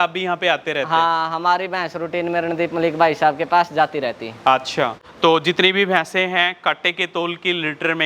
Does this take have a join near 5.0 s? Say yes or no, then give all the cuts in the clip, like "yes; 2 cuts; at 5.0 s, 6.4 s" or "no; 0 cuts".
yes; 1 cut; at 5.0 s